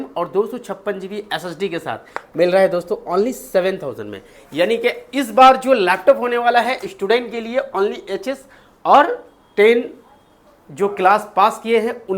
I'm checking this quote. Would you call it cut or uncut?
uncut